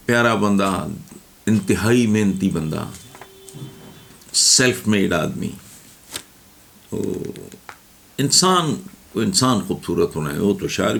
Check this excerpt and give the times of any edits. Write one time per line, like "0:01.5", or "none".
none